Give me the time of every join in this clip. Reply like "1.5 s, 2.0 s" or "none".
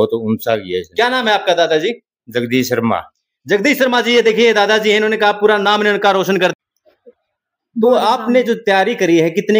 6.5 s